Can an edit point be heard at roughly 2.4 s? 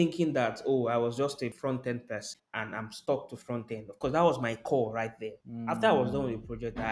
yes; 2 cuts; at 1.6 s, 2.4 s

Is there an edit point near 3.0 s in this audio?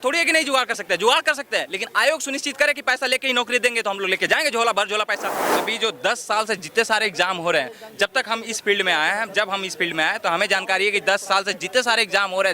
no; 1 cut; at 5.6 s

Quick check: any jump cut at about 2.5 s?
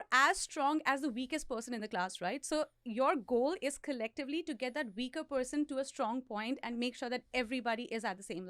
no; 0 cuts

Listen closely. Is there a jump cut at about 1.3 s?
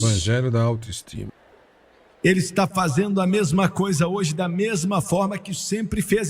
yes; 1 cut; at 1.3 s

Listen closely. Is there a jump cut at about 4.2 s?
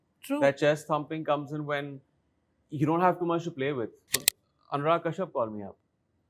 yes; 1 cut; at 4.2 s

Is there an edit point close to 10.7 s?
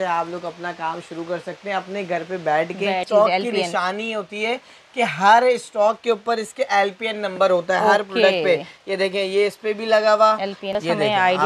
yes; 2 cuts; at 3.1 s, 10.7 s

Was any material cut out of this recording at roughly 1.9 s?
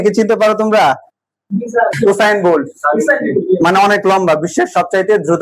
yes; 1 cut; at 1.9 s

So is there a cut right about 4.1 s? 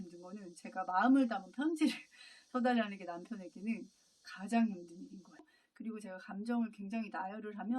no; 1 cut; at 5.6 s

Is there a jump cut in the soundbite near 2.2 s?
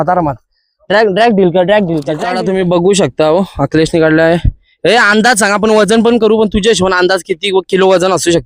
yes; 1 cut; at 2.2 s

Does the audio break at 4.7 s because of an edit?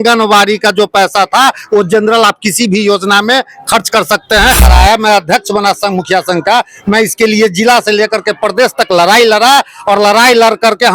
yes; 1 cut; at 4.7 s

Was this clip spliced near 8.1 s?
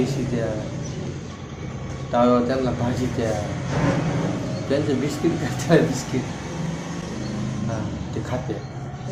no; 0 cuts

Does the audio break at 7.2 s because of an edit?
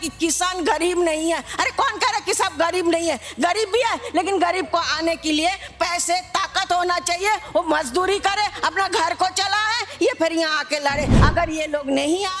no; 1 cut; at 11.1 s

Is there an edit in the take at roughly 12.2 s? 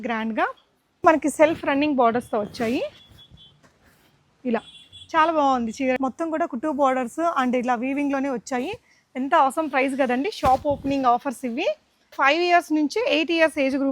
yes; 3 cuts; at 1.0 s, 6.0 s, 12.2 s

